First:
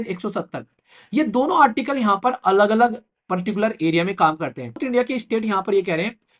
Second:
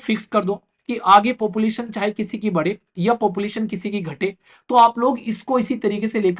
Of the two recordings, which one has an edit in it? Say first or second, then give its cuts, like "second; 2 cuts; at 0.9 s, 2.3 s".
first; 1 cut; at 4.8 s